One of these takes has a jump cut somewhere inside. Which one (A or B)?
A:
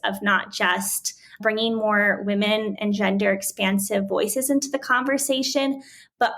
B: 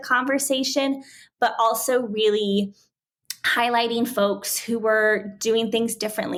A